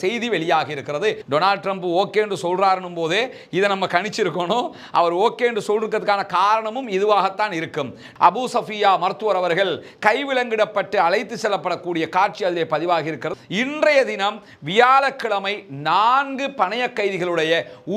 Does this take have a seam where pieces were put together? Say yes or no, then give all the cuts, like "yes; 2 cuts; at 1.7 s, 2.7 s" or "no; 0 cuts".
yes; 3 cuts; at 1.2 s, 8.0 s, 13.3 s